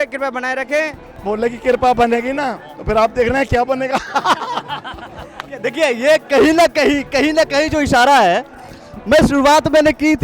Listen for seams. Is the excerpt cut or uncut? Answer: cut